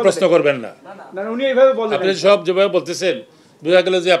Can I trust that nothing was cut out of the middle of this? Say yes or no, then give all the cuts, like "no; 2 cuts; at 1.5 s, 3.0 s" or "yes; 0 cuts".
yes; 0 cuts